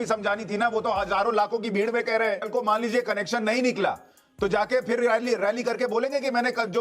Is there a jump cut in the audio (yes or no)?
yes